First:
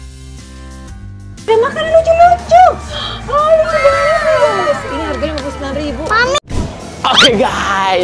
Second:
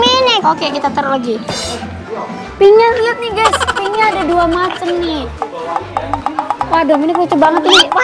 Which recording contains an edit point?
first; 2 cuts; at 1.5 s, 6.4 s

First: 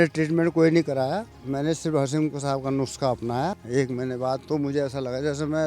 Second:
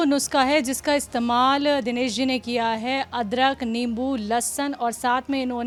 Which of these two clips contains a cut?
first; 1 cut; at 3.6 s

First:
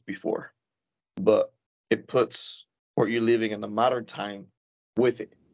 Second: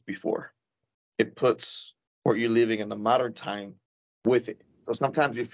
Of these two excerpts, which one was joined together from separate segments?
second; 1 cut; at 1.0 s

